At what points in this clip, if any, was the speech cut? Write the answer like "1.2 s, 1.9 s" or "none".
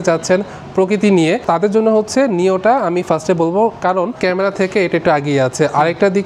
1.5 s, 4.2 s